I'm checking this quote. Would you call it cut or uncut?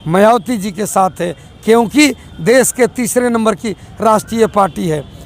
uncut